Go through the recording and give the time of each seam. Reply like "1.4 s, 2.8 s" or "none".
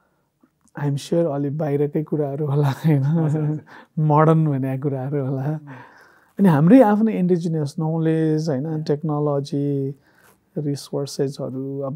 none